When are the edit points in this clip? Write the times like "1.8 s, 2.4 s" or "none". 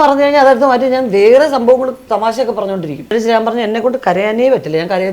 3.1 s